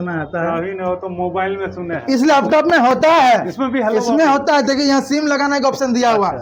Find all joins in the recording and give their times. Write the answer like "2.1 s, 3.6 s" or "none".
none

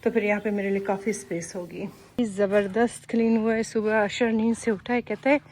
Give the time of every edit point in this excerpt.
2.2 s

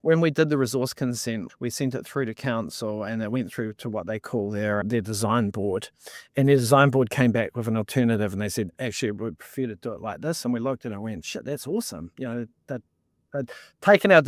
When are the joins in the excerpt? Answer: 1.5 s, 4.8 s

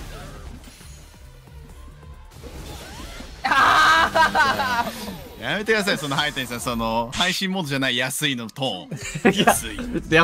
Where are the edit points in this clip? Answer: none

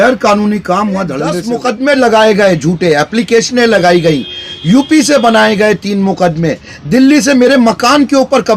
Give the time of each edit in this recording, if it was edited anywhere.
1.4 s

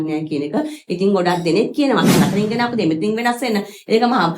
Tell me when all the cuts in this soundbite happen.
2.2 s

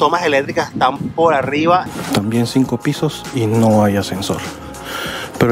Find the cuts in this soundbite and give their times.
1.9 s

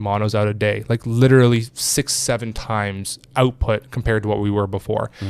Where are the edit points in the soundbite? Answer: none

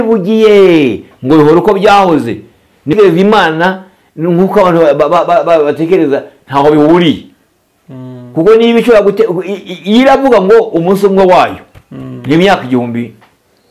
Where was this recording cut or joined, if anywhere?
2.9 s

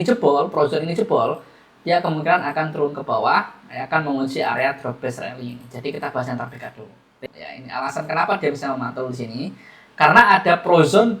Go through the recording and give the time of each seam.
7.2 s

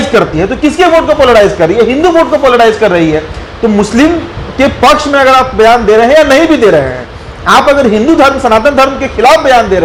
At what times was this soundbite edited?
none

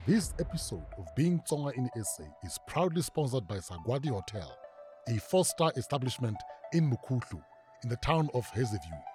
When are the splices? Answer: none

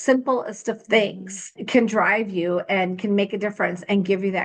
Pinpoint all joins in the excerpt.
1.6 s

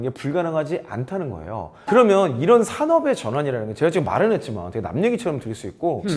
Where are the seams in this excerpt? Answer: 1.6 s

